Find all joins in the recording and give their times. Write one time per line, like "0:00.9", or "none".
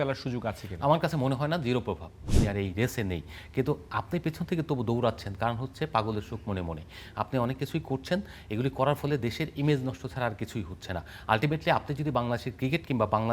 0:02.2